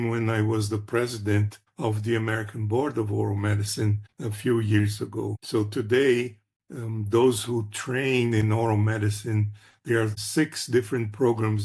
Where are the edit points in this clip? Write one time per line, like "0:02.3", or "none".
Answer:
0:10.2